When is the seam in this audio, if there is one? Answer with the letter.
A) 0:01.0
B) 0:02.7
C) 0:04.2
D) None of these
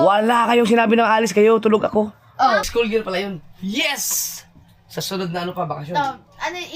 B